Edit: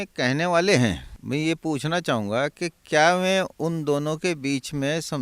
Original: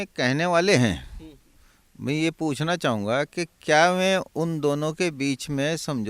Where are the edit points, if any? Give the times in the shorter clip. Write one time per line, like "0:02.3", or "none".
0:01.1